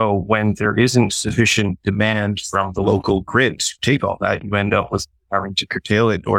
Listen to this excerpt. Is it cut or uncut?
uncut